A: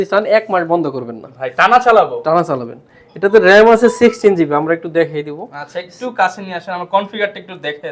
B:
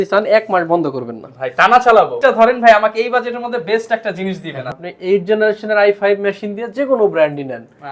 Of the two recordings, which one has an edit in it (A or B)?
B